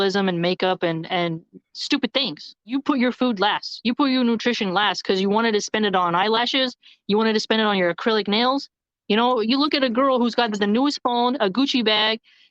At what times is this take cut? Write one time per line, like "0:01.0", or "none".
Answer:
0:02.7